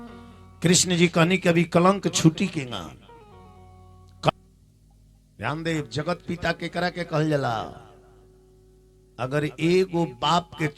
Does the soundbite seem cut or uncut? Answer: cut